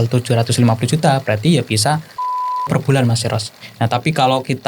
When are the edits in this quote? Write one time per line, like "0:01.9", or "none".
0:03.6